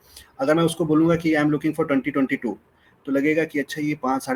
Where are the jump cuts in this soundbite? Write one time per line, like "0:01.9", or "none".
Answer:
none